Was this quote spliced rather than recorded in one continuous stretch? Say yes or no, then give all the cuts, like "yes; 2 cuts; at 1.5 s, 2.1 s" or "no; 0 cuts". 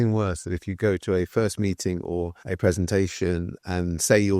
no; 0 cuts